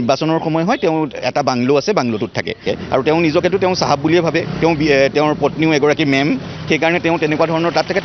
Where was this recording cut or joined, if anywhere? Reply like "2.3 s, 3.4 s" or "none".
2.6 s

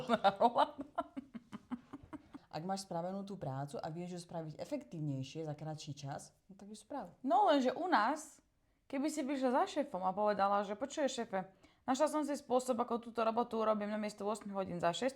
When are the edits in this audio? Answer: 2.4 s

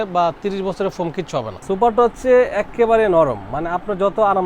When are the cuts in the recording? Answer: 1.5 s

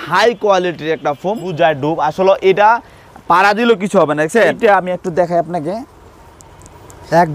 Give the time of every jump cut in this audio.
1.5 s, 4.6 s

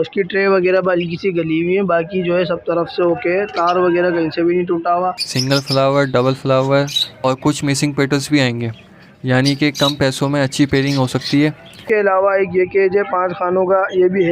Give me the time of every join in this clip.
5.3 s, 11.8 s

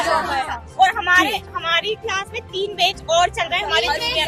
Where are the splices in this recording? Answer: none

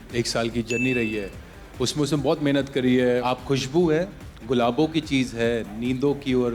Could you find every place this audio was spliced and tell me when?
3.2 s

